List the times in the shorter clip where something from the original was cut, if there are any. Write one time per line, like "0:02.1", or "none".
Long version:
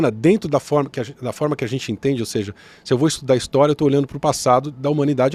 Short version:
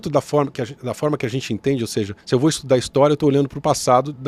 0:02.2